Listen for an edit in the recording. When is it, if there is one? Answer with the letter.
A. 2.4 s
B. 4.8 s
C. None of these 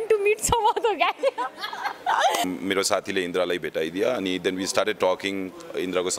A